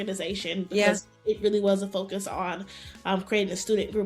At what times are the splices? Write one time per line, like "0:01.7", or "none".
none